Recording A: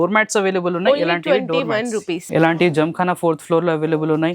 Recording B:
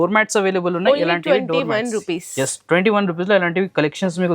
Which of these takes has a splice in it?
A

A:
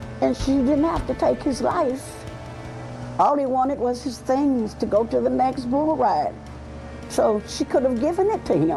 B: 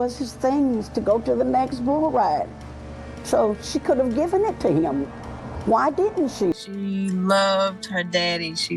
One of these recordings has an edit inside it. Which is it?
B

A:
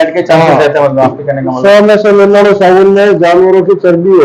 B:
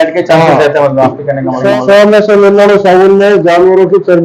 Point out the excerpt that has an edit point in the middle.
A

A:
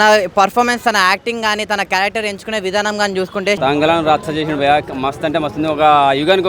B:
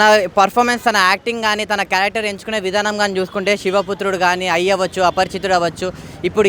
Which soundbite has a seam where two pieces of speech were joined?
A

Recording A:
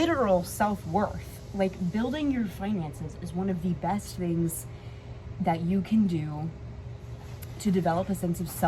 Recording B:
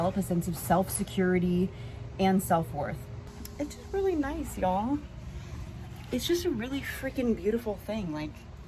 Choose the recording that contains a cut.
B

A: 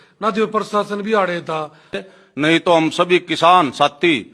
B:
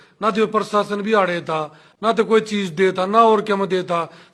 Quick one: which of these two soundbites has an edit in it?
A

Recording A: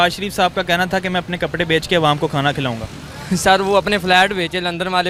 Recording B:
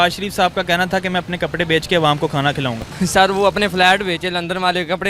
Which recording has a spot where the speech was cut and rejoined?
B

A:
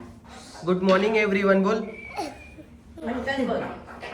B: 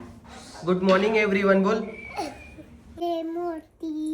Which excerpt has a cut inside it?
B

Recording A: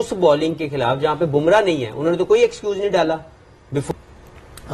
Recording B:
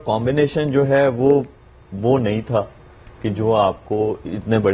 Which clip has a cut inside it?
A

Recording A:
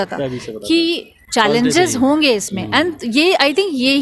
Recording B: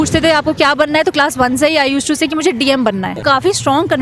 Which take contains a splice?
B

